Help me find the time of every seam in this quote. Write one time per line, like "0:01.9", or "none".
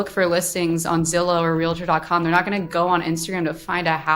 none